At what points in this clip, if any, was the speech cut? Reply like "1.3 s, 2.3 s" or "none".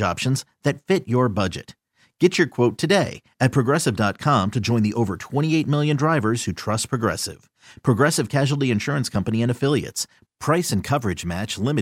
none